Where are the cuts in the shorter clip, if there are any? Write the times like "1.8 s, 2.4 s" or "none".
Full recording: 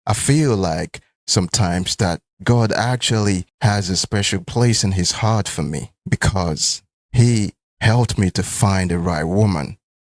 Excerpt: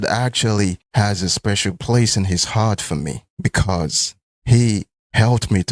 none